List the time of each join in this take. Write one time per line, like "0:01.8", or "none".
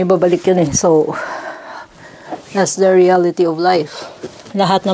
none

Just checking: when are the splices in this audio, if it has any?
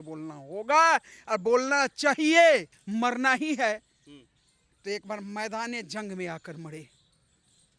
0:02.8

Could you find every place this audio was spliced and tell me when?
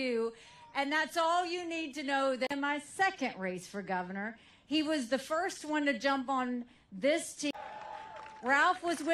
none

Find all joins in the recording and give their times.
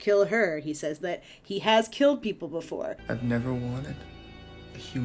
0:03.0

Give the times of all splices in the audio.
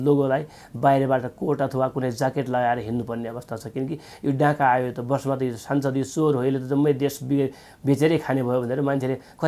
none

